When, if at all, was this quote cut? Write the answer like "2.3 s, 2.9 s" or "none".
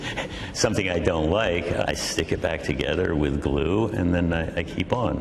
1.8 s